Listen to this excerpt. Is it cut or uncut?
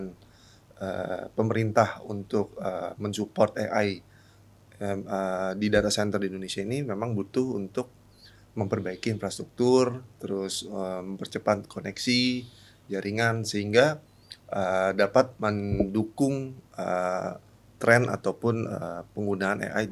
uncut